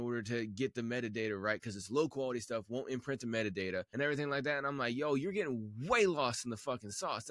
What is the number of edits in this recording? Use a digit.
1